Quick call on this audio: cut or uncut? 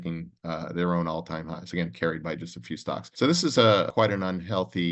cut